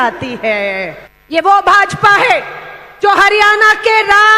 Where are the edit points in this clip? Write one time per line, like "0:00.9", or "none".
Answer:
0:01.0